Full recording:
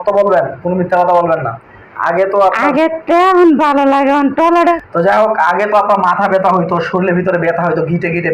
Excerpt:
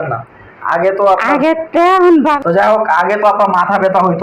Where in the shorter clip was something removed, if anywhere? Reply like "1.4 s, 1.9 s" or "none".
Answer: 2.4 s